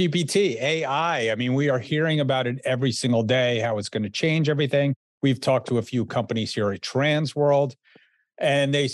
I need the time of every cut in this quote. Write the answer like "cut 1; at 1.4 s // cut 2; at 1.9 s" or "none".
cut 1; at 5.0 s

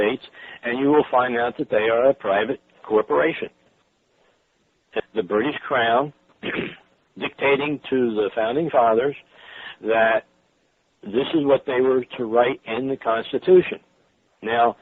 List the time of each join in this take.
none

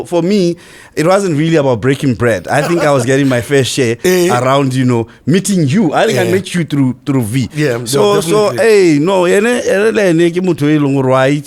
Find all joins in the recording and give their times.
none

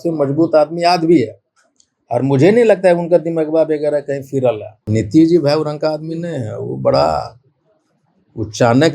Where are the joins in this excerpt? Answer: cut 1; at 4.9 s

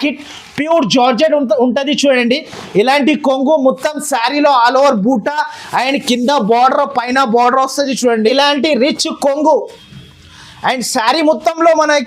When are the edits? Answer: cut 1; at 8.3 s

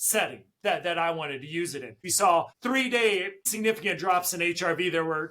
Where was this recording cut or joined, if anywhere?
cut 1; at 1.9 s

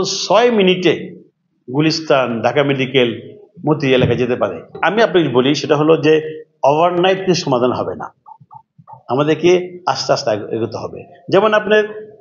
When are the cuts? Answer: none

